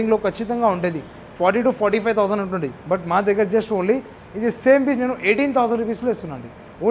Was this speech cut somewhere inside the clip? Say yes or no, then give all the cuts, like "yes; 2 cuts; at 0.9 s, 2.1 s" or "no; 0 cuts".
no; 0 cuts